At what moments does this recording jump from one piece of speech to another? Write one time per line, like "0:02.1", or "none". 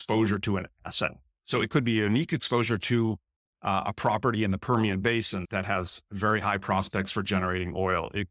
0:05.4